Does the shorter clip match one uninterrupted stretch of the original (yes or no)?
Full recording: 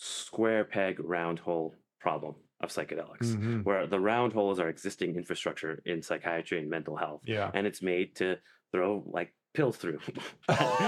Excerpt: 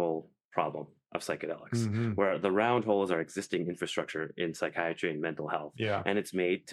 yes